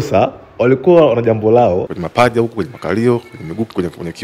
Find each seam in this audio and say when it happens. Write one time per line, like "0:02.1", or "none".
0:02.0